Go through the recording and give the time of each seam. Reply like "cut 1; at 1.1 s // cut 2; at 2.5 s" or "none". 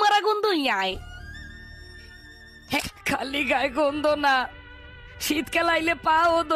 cut 1; at 2.8 s